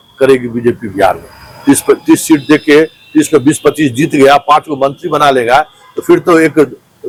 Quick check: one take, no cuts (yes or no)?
yes